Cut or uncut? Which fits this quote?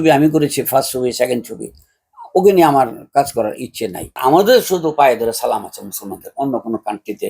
cut